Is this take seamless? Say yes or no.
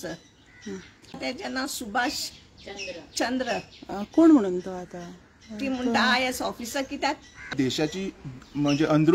no